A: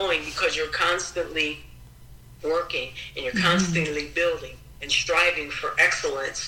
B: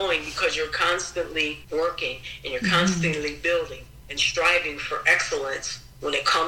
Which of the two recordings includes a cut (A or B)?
B